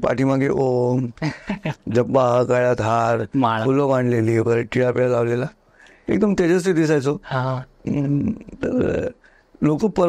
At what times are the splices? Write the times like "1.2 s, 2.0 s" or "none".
none